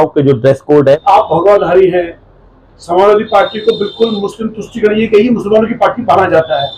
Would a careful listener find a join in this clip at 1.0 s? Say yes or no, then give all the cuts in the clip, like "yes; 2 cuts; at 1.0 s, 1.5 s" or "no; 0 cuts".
yes; 1 cut; at 1.0 s